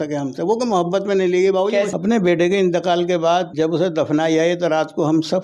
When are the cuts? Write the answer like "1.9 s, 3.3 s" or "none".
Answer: 1.9 s, 3.5 s